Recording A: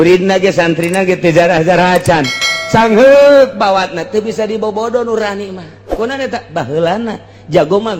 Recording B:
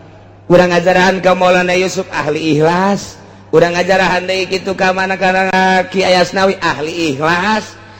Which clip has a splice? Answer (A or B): B